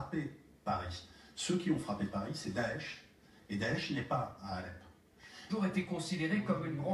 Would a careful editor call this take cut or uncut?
uncut